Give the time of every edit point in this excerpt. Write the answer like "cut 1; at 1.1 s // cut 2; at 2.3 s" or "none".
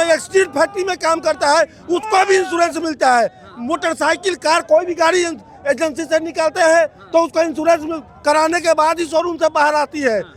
none

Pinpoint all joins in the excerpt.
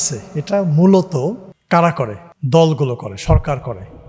cut 1; at 1.5 s // cut 2; at 2.3 s

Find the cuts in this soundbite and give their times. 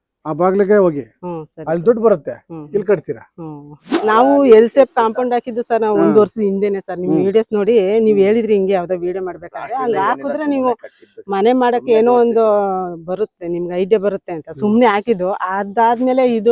cut 1; at 3.9 s

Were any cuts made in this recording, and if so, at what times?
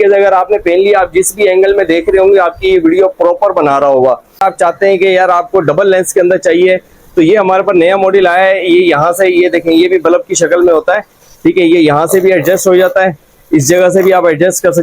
cut 1; at 4.4 s

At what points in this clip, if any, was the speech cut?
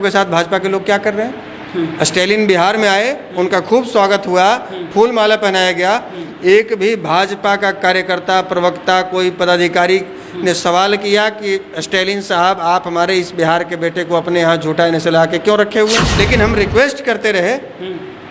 cut 1; at 16.2 s

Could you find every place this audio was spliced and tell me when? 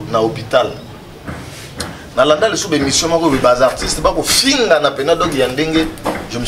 none

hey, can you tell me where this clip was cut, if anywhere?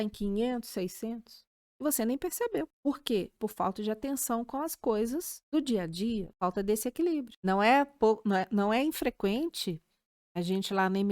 cut 1; at 3.3 s // cut 2; at 5.4 s // cut 3; at 6.3 s // cut 4; at 7.3 s

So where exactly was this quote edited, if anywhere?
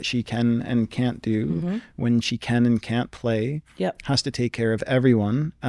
none

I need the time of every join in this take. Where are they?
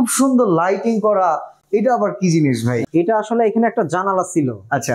cut 1; at 2.8 s

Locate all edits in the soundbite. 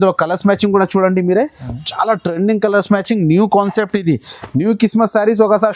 none

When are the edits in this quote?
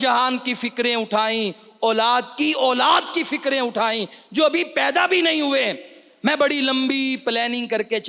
none

